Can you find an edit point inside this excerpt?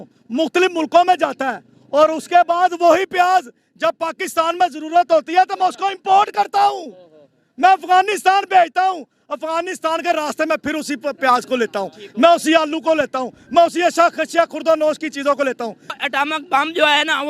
yes; 1 cut; at 16.0 s

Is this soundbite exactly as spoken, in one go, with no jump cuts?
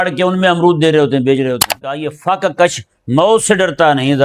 no; 1 cut; at 2.1 s

